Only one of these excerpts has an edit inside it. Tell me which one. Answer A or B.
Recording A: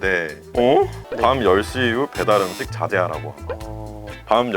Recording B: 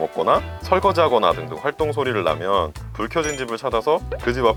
A